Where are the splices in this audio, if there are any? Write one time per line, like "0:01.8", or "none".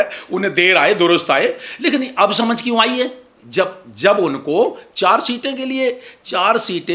none